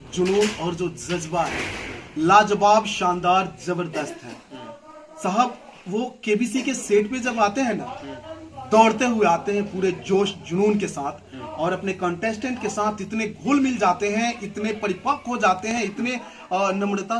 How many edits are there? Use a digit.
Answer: 0